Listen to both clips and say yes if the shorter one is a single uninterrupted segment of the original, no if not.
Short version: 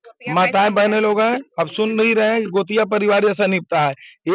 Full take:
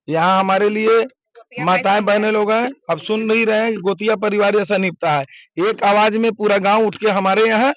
yes